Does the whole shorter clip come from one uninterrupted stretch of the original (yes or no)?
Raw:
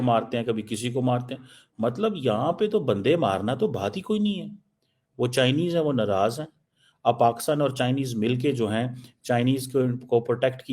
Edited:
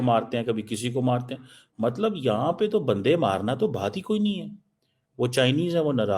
yes